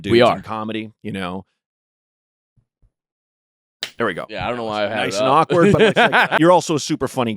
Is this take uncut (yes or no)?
no